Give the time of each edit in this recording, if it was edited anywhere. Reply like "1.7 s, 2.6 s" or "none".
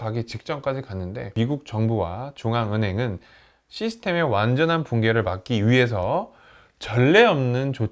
1.3 s